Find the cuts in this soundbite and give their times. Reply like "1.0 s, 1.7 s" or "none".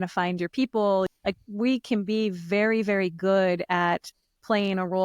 1.1 s